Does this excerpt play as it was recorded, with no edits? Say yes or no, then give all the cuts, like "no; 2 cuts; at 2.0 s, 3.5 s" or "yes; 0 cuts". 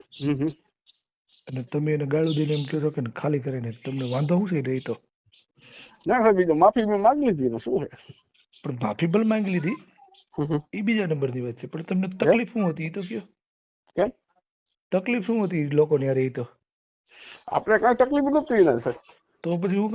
yes; 0 cuts